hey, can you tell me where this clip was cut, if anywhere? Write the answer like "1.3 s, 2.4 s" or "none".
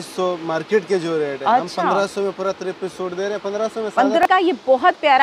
4.2 s